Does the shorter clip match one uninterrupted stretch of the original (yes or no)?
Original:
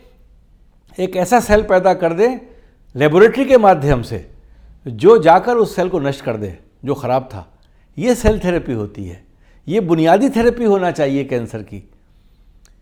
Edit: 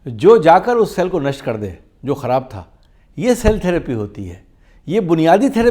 yes